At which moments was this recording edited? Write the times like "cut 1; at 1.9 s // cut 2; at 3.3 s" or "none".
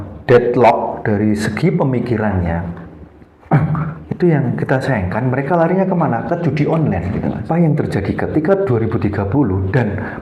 cut 1; at 7.4 s